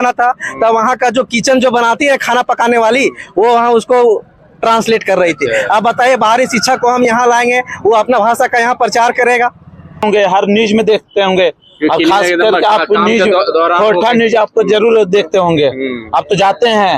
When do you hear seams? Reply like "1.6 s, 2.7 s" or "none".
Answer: 10.0 s

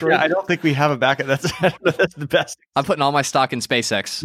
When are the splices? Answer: 2.6 s

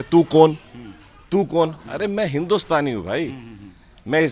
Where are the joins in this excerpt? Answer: none

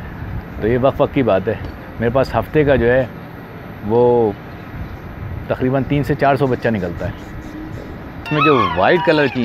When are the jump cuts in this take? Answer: 8.3 s

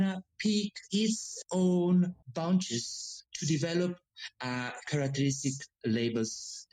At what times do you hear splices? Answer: none

